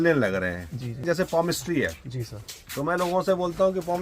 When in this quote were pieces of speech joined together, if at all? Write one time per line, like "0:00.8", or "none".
0:01.0